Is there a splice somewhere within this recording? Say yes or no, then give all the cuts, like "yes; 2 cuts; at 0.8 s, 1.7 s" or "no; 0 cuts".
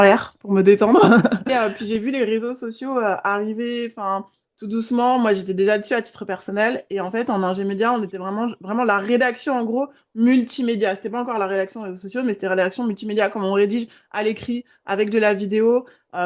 yes; 1 cut; at 1.5 s